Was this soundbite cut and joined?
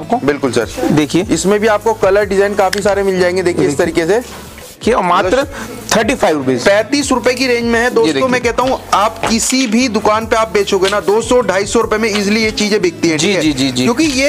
yes; 1 cut; at 4.8 s

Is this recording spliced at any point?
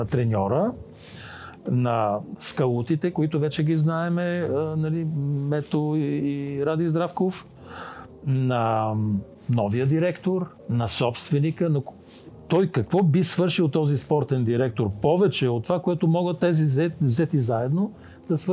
yes; 3 cuts; at 2.3 s, 9.4 s, 10.6 s

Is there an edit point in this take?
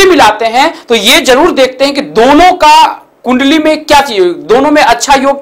no; 0 cuts

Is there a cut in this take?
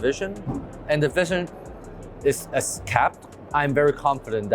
no; 0 cuts

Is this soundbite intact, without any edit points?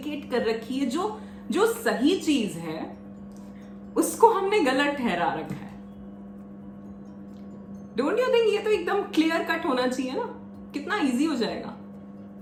yes; 0 cuts

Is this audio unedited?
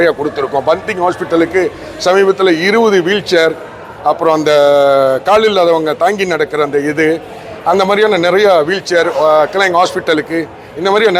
yes; 0 cuts

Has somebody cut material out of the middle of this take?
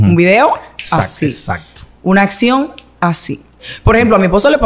yes; 1 cut; at 3.6 s

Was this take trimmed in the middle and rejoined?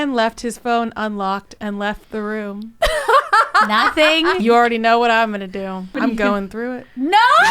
yes; 2 cuts; at 4.4 s, 5.9 s

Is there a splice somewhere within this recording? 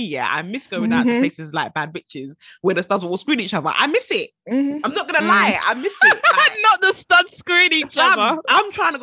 no; 0 cuts

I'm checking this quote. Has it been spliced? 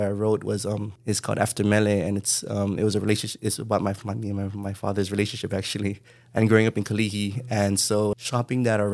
yes; 2 cuts; at 0.9 s, 8.2 s

